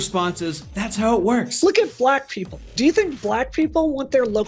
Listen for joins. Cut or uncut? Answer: cut